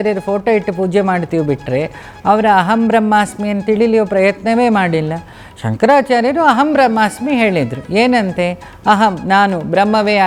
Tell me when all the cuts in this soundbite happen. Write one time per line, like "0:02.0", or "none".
none